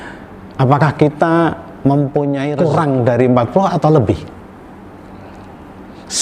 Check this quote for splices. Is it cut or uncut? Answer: cut